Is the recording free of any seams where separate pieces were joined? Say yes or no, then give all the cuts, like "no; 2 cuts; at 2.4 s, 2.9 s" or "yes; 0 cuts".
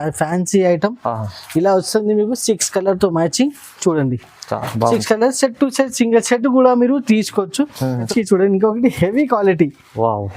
no; 1 cut; at 8.1 s